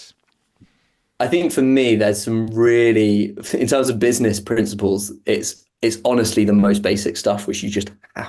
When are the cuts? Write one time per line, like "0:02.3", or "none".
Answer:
0:01.0